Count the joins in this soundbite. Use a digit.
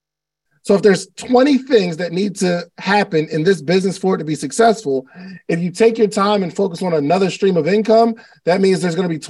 0